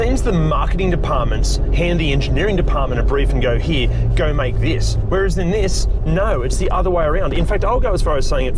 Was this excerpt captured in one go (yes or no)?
yes